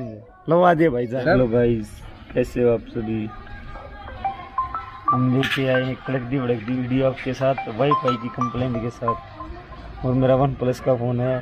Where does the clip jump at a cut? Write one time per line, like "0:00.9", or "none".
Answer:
0:01.4